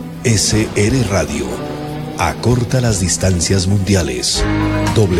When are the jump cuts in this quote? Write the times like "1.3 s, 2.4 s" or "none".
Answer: none